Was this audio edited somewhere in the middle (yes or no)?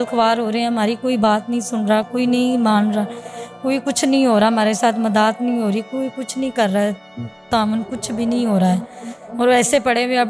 no